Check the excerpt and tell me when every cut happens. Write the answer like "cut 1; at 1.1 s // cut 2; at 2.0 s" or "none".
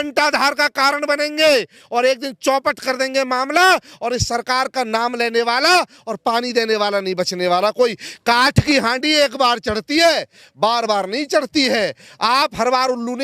none